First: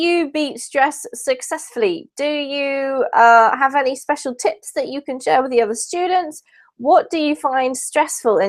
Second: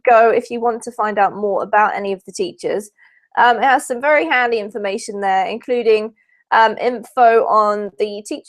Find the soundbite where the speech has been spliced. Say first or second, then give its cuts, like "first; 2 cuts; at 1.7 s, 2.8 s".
second; 1 cut; at 4.7 s